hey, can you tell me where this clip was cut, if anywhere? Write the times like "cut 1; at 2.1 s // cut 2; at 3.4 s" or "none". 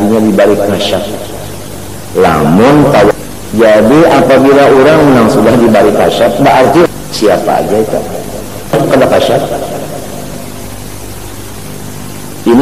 cut 1; at 3.1 s // cut 2; at 6.9 s // cut 3; at 8.7 s